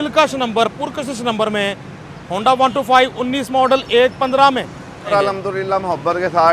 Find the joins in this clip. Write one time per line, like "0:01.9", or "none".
0:05.1